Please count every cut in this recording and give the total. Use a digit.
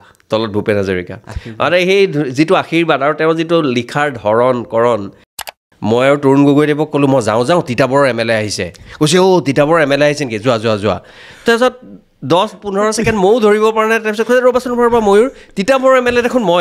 1